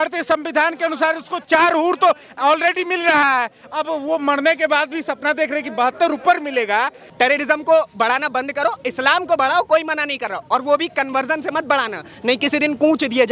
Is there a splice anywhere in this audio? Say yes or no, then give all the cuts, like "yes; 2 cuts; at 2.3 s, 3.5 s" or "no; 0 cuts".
yes; 1 cut; at 7.0 s